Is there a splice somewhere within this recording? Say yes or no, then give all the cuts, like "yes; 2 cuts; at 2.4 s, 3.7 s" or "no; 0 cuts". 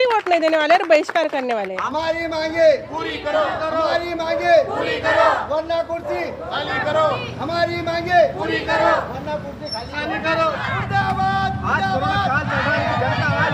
yes; 2 cuts; at 1.7 s, 10.6 s